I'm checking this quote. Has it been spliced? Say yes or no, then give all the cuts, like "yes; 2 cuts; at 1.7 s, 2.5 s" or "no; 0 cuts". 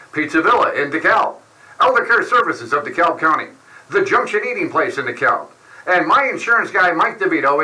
no; 0 cuts